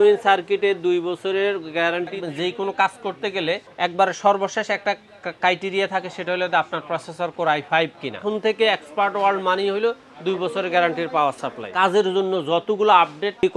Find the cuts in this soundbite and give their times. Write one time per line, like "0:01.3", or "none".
0:02.2
0:03.7
0:08.2
0:11.6